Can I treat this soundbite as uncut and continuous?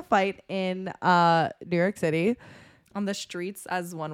yes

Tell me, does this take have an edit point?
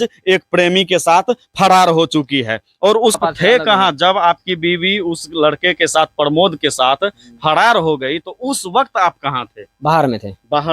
yes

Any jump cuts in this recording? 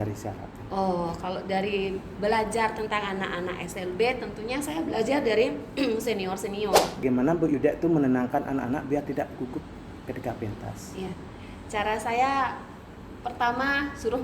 yes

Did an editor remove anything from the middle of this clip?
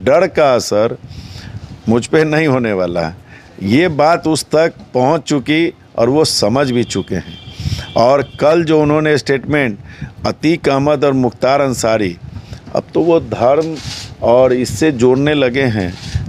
no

